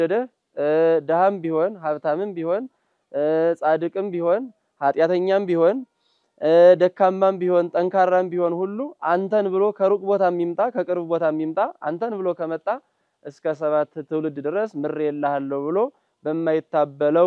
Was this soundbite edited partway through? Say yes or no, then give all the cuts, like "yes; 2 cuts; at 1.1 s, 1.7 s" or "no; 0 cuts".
no; 0 cuts